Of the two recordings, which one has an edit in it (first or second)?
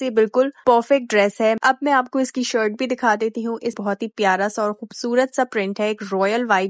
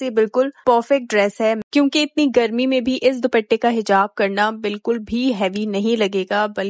first